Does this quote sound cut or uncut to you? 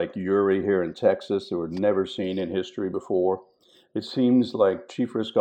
uncut